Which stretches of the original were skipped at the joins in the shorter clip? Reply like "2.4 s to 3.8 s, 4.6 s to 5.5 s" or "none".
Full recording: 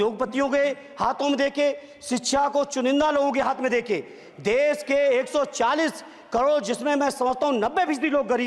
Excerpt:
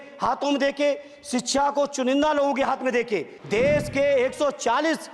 4.1 s to 4.3 s